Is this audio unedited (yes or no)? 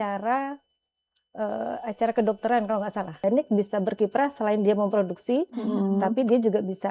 no